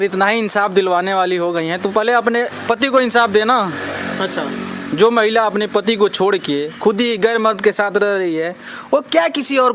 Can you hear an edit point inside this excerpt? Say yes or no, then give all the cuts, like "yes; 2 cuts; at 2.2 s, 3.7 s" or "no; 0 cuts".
no; 0 cuts